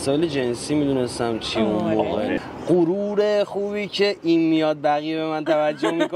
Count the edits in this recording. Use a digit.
1